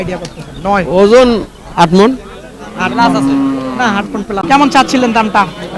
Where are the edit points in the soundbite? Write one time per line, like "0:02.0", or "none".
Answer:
0:04.4